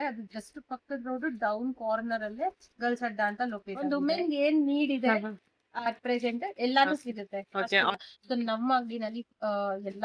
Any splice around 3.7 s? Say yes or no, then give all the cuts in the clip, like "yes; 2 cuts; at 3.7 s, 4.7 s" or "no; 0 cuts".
yes; 2 cuts; at 3.7 s, 7.9 s